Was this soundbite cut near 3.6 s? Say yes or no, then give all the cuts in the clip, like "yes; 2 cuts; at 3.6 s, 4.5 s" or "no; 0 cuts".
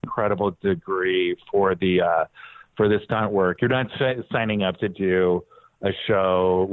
yes; 1 cut; at 3.6 s